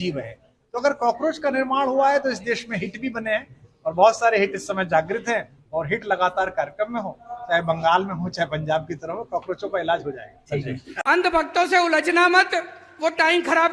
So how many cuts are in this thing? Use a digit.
1